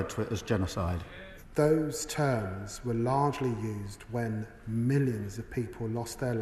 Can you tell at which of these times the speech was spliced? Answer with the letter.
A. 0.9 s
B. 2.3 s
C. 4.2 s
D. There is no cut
A